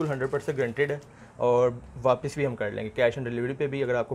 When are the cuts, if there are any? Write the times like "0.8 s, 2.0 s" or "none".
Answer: none